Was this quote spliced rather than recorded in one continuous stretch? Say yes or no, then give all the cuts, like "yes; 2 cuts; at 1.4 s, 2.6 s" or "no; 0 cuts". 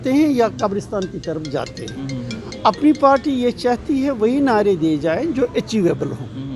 no; 0 cuts